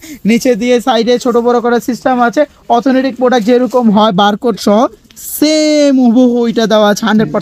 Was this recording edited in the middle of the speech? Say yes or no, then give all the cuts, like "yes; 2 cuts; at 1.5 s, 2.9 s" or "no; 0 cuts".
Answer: no; 0 cuts